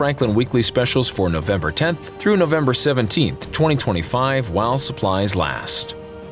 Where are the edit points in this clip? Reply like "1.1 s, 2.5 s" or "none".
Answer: none